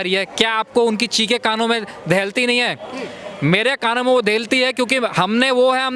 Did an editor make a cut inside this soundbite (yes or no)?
no